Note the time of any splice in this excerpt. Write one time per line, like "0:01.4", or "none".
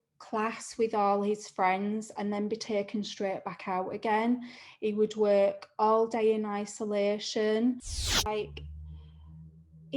0:08.1